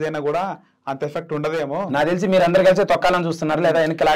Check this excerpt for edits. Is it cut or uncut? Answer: uncut